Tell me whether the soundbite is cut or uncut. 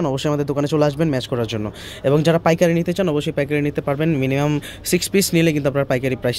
uncut